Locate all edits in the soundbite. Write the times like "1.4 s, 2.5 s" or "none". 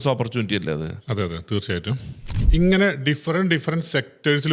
2.3 s